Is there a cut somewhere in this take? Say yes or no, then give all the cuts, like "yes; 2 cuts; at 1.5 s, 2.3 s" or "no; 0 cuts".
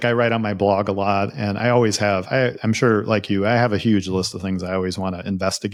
no; 0 cuts